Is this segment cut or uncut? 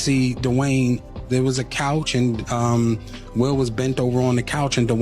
cut